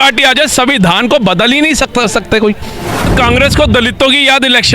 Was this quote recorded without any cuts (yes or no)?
no